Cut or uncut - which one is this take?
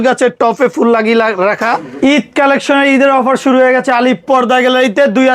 cut